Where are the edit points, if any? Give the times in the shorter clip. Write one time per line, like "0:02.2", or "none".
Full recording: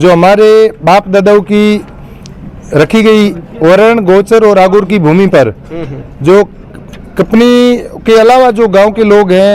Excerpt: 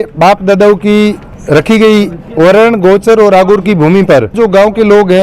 0:01.3
0:04.3